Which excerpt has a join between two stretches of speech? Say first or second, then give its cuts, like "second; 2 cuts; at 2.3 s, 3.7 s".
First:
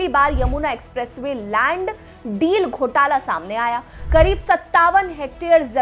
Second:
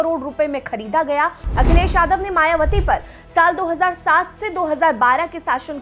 second; 1 cut; at 1.4 s